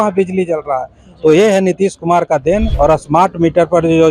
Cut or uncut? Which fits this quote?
cut